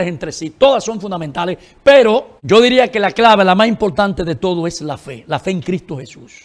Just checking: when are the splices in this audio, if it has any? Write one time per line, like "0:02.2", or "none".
0:02.3